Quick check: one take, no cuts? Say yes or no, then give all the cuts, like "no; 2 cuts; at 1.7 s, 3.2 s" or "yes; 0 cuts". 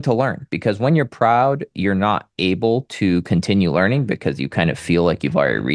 yes; 0 cuts